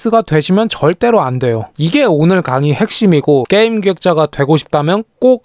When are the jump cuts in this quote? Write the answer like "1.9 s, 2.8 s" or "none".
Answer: 1.7 s